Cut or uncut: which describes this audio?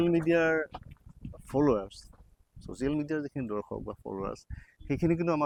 uncut